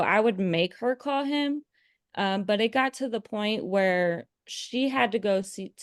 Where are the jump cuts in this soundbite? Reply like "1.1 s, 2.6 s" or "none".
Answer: none